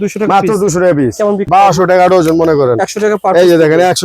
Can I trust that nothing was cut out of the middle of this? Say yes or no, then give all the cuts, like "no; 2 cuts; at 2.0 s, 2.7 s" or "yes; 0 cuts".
no; 1 cut; at 1.5 s